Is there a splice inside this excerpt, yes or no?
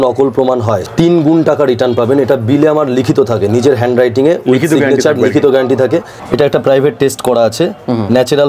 yes